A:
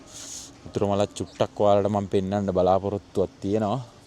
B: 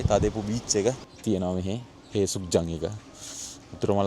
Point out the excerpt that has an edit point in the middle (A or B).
B